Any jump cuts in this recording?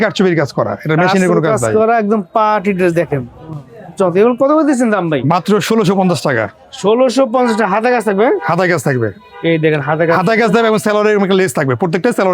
no; 0 cuts

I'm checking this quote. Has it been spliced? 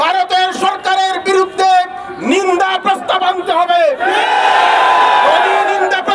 no; 0 cuts

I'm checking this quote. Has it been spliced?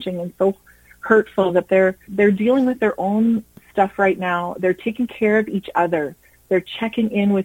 yes; 2 cuts; at 2.1 s, 3.6 s

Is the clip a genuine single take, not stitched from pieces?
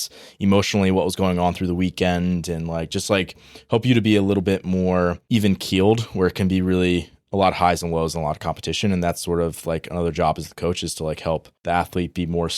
no; 2 cuts; at 5.2 s, 11.5 s

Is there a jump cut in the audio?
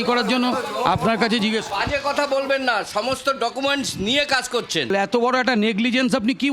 yes; 1 cut; at 4.9 s

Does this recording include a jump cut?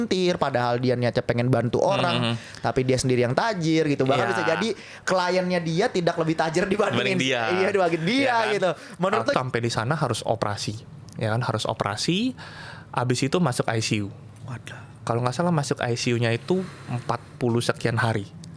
yes; 1 cut; at 9.3 s

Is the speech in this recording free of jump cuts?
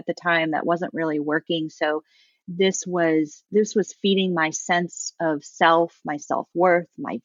yes; 0 cuts

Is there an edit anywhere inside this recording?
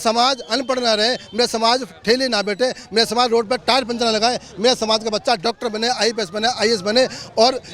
no; 0 cuts

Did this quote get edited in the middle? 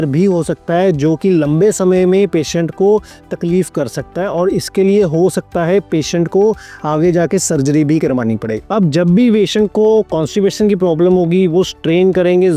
yes; 1 cut; at 8.5 s

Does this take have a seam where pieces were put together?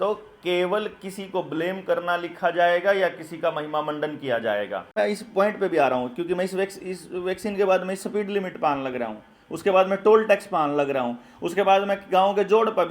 yes; 1 cut; at 4.9 s

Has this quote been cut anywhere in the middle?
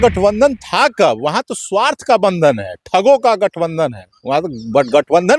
no; 0 cuts

